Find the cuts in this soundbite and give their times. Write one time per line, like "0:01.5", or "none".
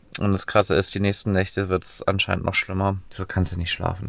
0:03.1